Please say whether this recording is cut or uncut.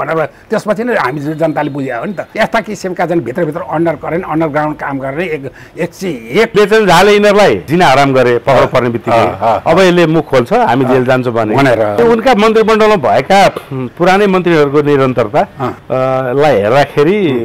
cut